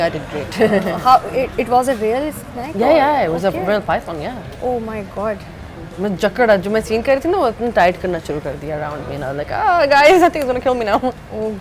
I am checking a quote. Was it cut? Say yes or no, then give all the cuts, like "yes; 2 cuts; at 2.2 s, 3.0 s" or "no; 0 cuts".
no; 0 cuts